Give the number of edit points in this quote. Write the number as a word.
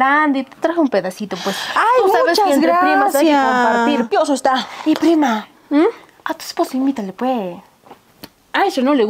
one